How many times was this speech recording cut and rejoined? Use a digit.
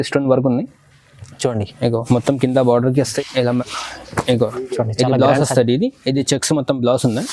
1